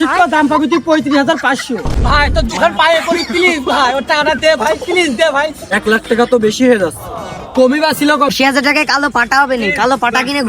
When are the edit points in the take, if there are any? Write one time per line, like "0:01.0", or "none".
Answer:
0:01.9
0:05.7
0:08.3